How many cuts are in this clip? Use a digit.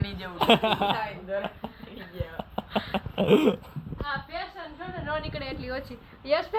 0